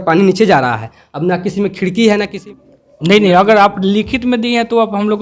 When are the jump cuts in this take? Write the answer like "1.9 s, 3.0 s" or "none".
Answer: 2.3 s